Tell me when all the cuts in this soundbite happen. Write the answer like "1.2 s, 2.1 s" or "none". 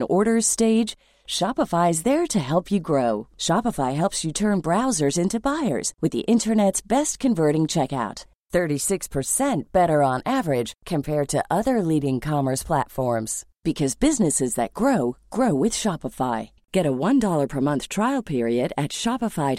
none